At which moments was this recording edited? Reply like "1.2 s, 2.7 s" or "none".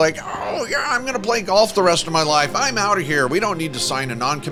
none